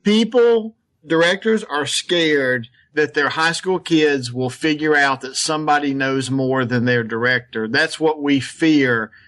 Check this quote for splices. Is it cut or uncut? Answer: cut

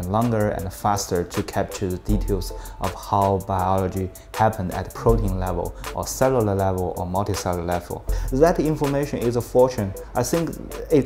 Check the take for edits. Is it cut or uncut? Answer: cut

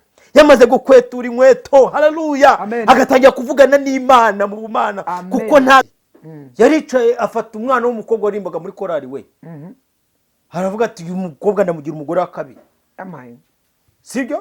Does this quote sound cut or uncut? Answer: cut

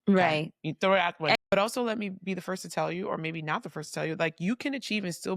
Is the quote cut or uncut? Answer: cut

